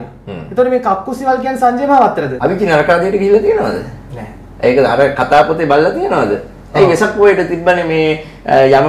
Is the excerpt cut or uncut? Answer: cut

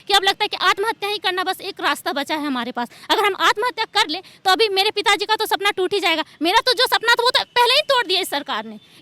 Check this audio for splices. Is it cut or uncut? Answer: uncut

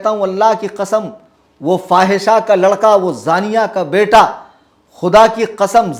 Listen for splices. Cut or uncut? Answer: uncut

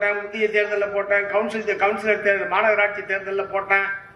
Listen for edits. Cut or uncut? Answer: uncut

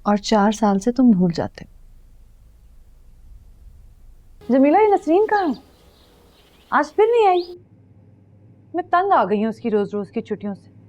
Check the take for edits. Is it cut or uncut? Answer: cut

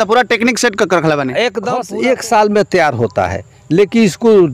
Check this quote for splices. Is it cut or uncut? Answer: cut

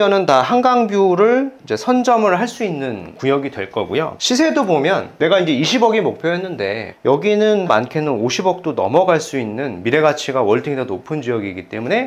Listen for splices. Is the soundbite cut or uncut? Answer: cut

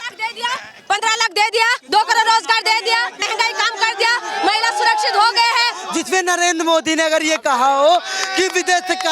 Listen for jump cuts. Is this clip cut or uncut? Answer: cut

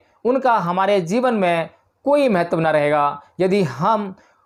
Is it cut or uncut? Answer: uncut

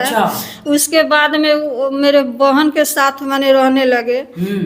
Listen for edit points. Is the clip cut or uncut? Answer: uncut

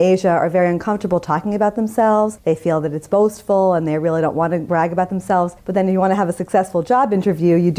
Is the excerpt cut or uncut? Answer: cut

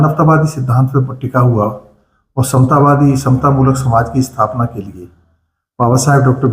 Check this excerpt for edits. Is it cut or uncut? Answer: uncut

